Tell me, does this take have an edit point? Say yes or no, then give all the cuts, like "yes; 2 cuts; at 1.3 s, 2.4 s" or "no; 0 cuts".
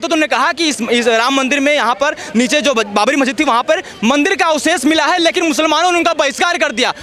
no; 0 cuts